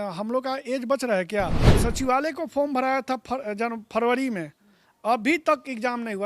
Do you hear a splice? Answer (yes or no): yes